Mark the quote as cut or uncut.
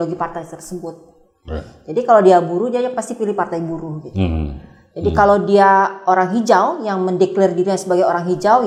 uncut